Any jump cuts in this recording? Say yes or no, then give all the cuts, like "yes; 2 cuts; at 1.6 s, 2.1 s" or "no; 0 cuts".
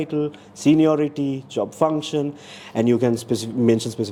no; 0 cuts